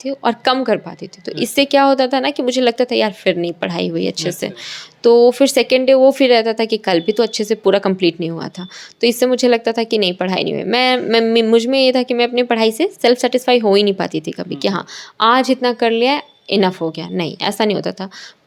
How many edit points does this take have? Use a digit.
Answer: 0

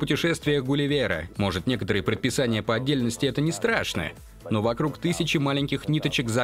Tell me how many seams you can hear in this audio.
1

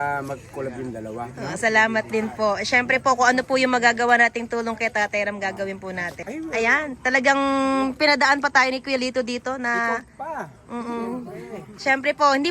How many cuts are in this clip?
1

